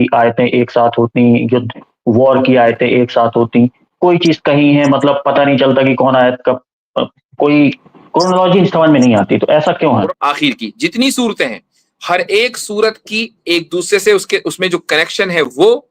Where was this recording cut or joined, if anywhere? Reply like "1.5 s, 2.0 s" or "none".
10.2 s